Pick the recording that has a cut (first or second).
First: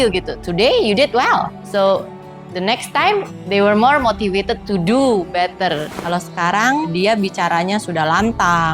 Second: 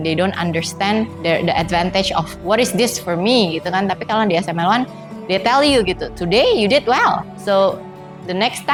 first